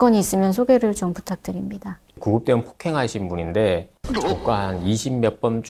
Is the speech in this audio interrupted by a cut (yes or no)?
no